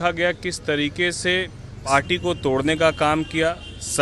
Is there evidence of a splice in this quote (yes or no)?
yes